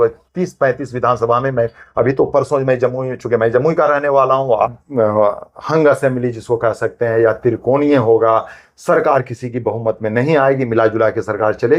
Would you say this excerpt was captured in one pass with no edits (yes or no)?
no